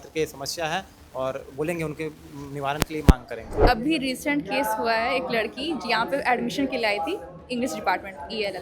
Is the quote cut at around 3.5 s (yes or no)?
yes